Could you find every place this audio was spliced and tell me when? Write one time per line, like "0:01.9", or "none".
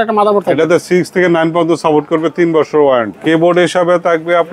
0:03.1